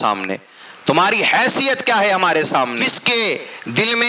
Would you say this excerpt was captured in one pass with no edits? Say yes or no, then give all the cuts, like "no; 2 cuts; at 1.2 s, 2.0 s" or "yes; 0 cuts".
no; 1 cut; at 2.8 s